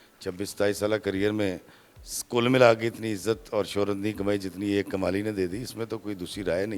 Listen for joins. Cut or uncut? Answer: uncut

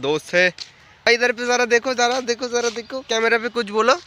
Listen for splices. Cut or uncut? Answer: cut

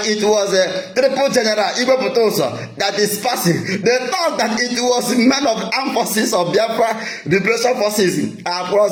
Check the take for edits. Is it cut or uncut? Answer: uncut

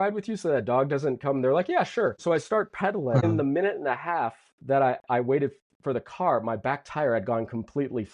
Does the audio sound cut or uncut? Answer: cut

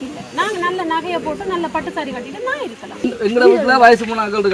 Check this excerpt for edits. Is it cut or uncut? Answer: cut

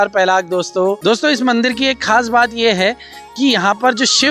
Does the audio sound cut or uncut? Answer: cut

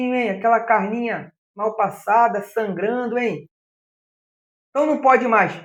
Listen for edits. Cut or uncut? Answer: uncut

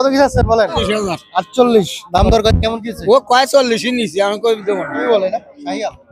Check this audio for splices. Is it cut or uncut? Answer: cut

